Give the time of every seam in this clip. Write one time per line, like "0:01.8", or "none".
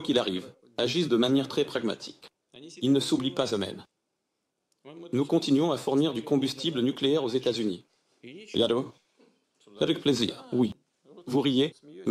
none